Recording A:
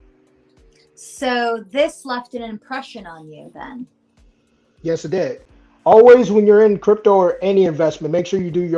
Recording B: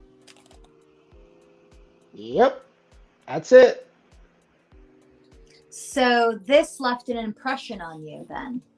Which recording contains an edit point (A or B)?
A